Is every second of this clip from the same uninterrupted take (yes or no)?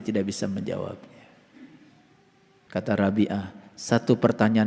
no